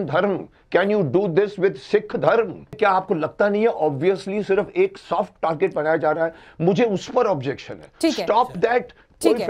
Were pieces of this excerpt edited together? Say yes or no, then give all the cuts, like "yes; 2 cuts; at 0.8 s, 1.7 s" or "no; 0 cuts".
yes; 1 cut; at 2.7 s